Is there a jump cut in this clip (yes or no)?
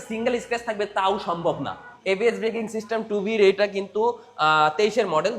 yes